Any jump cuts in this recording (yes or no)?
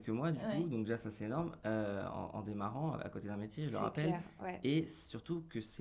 no